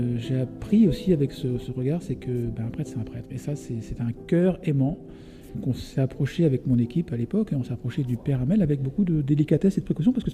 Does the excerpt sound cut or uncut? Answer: cut